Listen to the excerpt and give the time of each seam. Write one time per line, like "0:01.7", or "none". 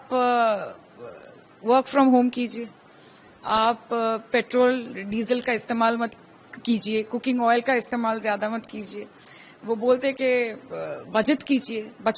none